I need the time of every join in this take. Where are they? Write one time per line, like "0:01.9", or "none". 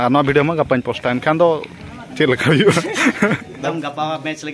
0:03.5